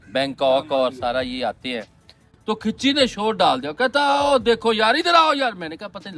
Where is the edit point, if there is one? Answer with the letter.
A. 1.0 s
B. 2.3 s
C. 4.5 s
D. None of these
B